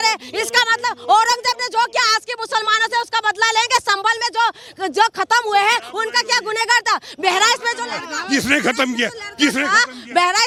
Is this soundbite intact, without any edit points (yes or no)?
yes